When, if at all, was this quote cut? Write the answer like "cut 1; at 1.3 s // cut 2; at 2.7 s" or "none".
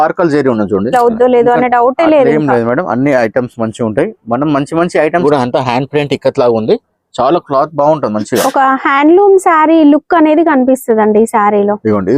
cut 1; at 0.9 s // cut 2; at 5.2 s